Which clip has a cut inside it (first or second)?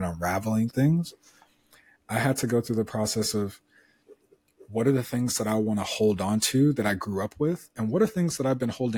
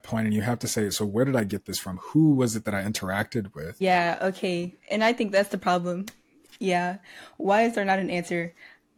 second